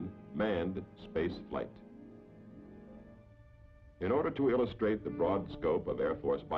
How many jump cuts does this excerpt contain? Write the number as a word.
zero